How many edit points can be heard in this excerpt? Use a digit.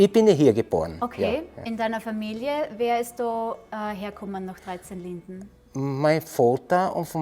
1